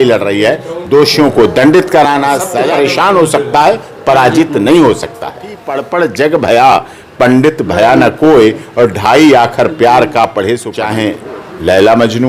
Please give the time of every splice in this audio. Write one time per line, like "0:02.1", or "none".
0:02.6
0:05.7
0:10.8